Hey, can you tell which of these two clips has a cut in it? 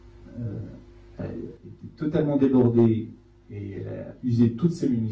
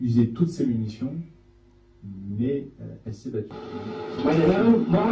second; 1 cut; at 3.3 s

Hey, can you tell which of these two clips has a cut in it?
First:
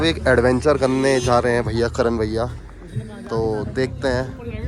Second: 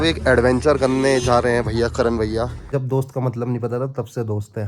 second; 1 cut; at 2.7 s

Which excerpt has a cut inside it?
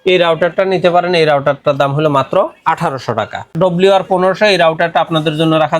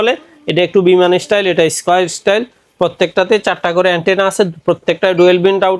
first; 1 cut; at 3.5 s

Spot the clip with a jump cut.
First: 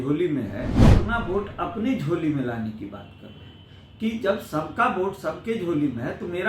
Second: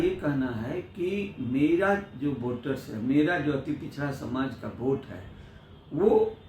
first; 1 cut; at 1.0 s

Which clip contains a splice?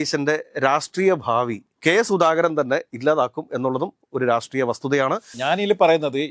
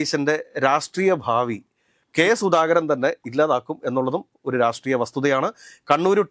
first; 2 cuts; at 1.6 s, 5.4 s

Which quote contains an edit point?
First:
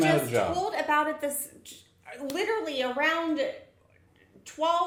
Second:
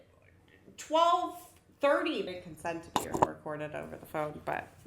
second; 1 cut; at 2.3 s

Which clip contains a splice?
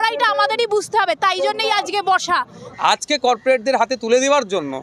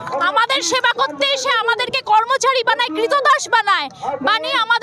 first; 1 cut; at 2.6 s

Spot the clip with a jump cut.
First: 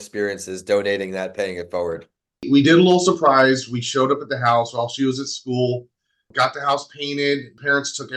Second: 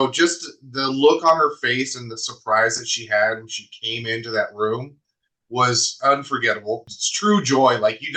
first; 1 cut; at 2.4 s

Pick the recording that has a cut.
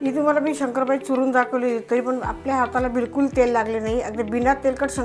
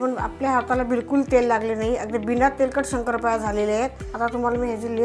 second; 1 cut; at 4.0 s

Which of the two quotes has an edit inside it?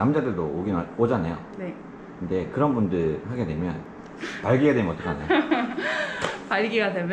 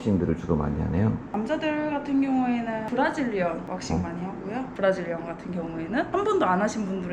second; 1 cut; at 4.7 s

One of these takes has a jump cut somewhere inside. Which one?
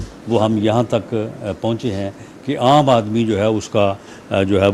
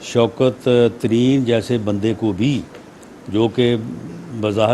second; 1 cut; at 2.1 s

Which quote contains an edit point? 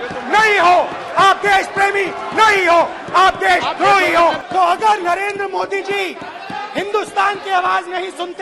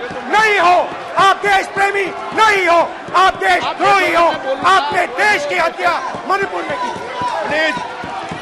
first; 1 cut; at 4.4 s

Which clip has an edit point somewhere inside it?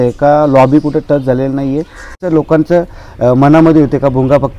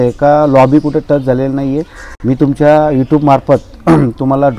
first; 1 cut; at 2.2 s

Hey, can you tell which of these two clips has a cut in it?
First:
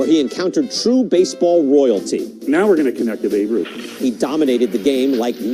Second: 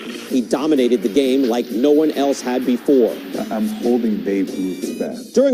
second; 1 cut; at 3.3 s

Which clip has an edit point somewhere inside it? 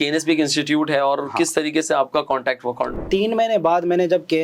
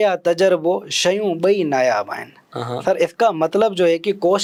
first; 1 cut; at 3.0 s

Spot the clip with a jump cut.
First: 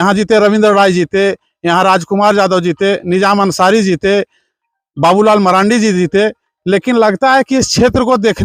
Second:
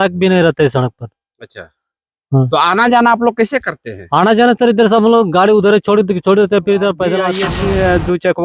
second; 1 cut; at 7.3 s

